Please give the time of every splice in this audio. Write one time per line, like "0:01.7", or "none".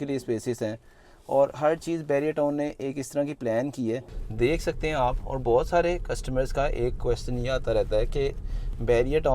0:04.2